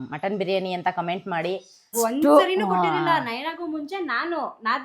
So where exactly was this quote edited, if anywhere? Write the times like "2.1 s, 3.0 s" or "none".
1.9 s